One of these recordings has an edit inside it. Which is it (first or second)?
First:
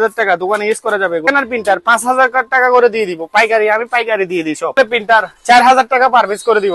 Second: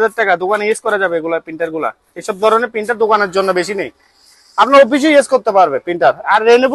first